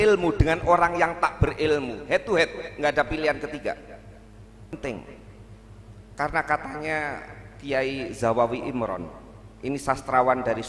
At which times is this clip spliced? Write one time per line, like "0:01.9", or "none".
0:04.7